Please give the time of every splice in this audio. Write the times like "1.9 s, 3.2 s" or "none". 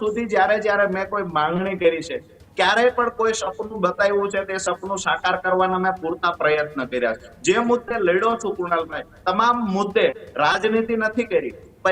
none

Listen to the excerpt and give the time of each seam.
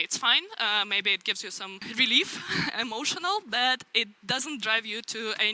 1.9 s

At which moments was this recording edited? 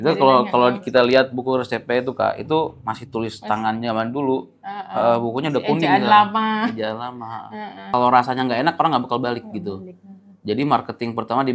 7.8 s

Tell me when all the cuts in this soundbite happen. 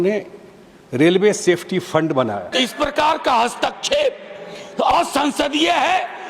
2.5 s

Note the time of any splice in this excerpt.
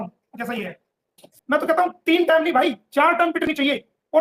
1.2 s

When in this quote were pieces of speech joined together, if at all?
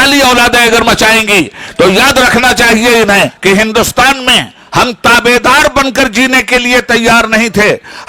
3.3 s

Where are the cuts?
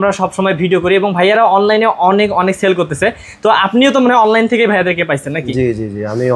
none

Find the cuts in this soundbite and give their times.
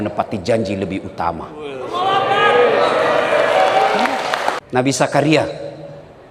4.6 s

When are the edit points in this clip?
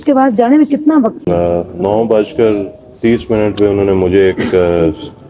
1.3 s

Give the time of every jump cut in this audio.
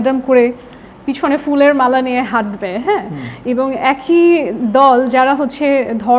none

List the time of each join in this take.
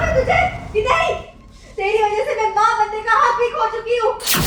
none

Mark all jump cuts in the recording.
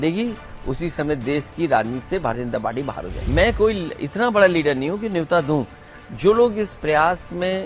3.3 s

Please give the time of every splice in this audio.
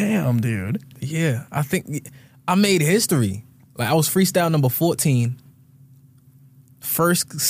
1.0 s

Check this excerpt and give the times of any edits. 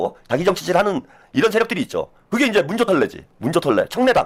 none

